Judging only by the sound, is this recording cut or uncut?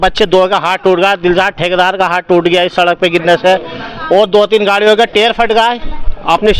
uncut